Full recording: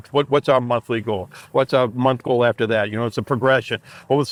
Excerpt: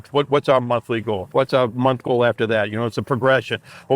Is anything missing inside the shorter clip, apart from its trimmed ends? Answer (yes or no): yes